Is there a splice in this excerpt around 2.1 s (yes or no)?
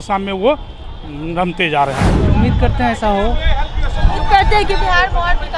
yes